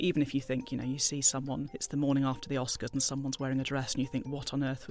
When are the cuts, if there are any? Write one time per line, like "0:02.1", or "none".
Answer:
0:01.8